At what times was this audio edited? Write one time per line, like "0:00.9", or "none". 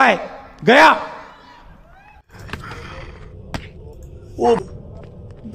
0:04.6